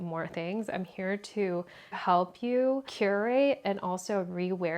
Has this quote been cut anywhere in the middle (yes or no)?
yes